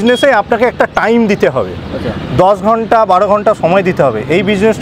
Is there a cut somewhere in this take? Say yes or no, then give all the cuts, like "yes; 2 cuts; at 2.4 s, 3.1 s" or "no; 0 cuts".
no; 0 cuts